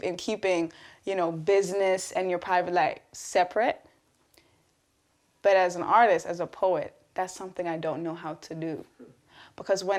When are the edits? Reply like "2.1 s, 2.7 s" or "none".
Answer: none